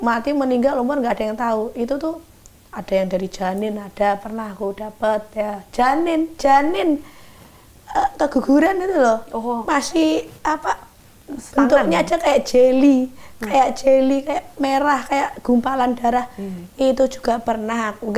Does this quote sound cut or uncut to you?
uncut